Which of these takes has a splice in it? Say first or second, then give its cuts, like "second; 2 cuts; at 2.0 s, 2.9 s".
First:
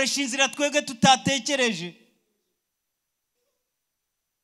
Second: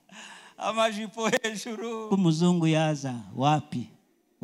second; 1 cut; at 2.1 s